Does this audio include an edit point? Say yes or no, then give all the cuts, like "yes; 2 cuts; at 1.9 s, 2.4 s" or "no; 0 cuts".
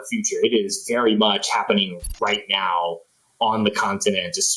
no; 0 cuts